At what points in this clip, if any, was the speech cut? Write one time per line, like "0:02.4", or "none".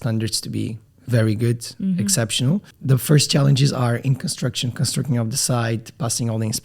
0:00.9
0:02.7